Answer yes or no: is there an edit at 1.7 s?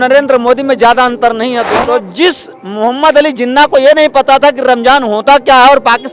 yes